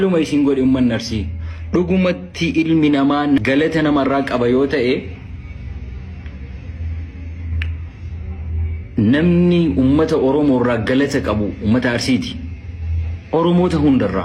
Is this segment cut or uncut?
uncut